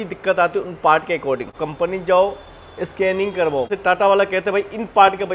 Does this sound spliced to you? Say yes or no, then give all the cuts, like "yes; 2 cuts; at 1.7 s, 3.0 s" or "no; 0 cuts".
yes; 2 cuts; at 1.6 s, 3.7 s